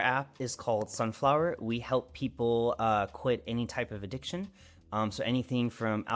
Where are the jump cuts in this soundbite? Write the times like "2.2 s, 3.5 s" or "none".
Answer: none